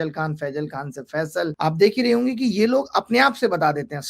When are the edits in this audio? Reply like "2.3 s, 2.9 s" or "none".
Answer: 1.5 s